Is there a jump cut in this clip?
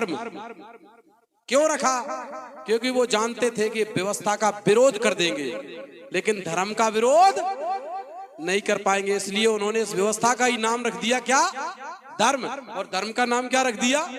no; 0 cuts

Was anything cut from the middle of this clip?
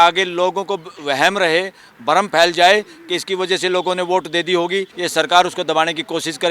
yes; 1 cut; at 5.0 s

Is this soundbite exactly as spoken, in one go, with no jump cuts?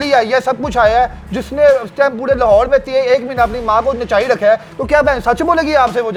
yes; 0 cuts

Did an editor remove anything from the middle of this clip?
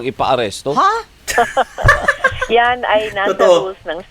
yes; 1 cut; at 1.1 s

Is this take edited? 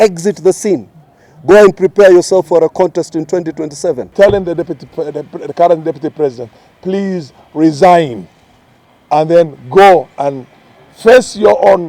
yes; 1 cut; at 4.1 s

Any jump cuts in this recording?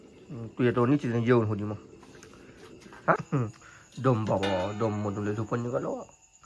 yes; 1 cut; at 3.2 s

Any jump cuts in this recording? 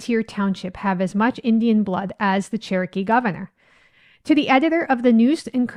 no; 0 cuts

